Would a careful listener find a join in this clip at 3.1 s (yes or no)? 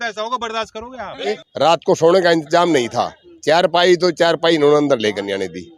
no